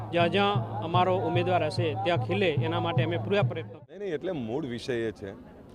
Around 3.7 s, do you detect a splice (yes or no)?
yes